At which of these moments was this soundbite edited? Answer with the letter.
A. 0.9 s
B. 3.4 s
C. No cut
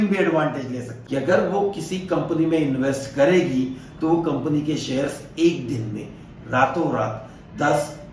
A